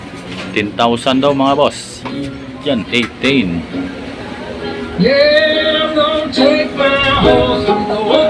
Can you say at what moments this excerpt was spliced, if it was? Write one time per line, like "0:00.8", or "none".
0:02.9